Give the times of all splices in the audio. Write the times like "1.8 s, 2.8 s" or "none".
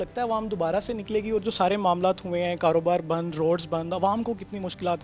none

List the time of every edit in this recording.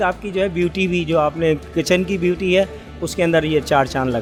none

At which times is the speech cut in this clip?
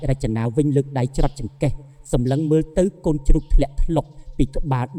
none

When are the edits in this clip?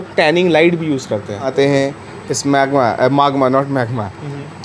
1.5 s

